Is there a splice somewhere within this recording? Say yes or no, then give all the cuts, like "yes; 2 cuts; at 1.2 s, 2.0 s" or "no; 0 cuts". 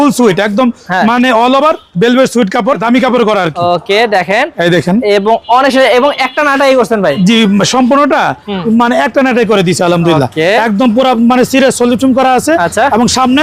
no; 0 cuts